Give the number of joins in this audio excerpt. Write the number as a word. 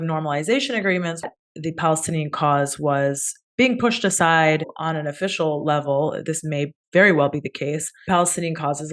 two